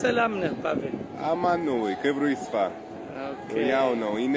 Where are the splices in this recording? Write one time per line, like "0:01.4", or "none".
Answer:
none